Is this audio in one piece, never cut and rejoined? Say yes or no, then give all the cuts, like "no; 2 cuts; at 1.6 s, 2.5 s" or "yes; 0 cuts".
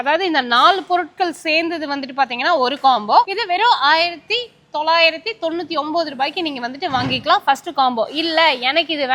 yes; 0 cuts